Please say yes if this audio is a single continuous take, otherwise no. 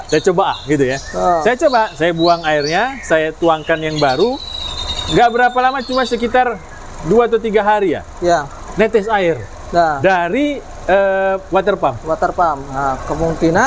yes